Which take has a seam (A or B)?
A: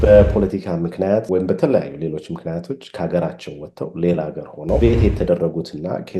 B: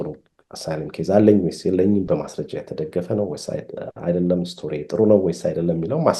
A